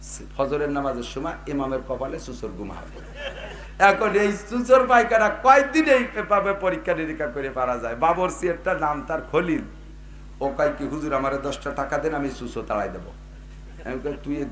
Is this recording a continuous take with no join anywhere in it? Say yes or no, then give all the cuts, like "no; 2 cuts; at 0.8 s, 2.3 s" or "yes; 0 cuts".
no; 1 cut; at 3.6 s